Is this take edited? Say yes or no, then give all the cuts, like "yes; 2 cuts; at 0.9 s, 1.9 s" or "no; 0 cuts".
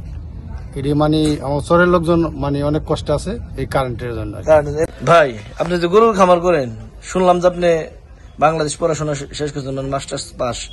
yes; 1 cut; at 4.9 s